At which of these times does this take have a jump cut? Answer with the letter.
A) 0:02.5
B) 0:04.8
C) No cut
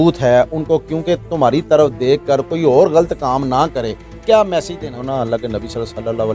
B